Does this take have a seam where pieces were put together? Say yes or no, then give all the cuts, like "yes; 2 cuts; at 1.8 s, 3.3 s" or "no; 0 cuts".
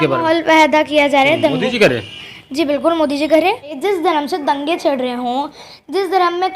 yes; 1 cut; at 3.8 s